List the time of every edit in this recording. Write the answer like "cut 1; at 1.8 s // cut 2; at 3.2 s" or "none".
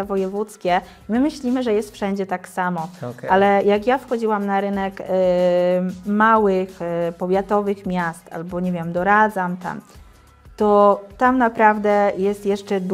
none